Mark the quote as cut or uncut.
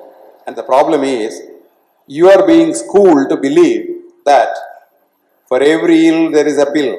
uncut